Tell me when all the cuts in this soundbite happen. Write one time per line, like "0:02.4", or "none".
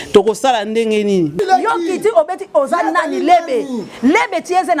0:01.4